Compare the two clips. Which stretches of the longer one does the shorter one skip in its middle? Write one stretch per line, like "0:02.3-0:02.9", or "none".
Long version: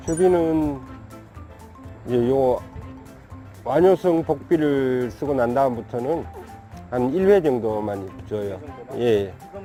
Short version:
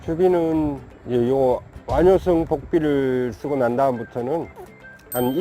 0:00.9-0:01.9
0:02.7-0:03.5